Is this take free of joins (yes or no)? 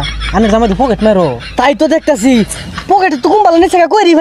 yes